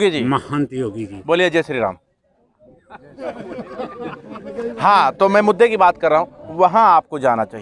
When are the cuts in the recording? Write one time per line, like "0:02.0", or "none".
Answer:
none